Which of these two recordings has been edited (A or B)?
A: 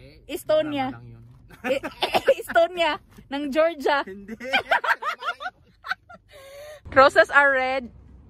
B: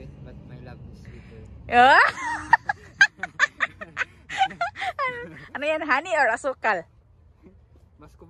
A